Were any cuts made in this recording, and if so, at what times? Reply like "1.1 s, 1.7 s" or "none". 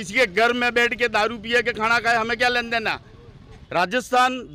3.6 s